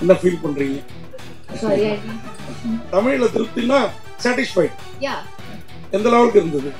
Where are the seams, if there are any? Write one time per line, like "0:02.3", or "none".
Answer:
none